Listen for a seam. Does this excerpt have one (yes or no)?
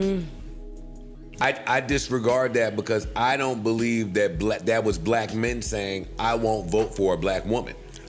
yes